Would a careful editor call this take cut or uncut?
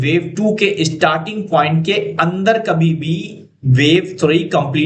uncut